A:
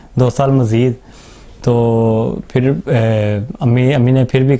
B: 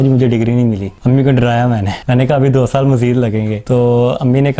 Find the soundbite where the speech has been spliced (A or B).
B